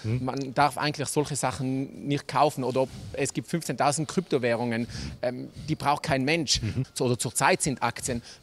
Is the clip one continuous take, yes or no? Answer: no